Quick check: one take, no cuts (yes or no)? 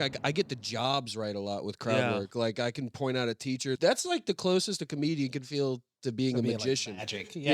no